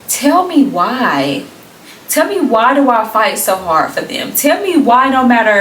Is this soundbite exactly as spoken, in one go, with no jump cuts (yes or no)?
yes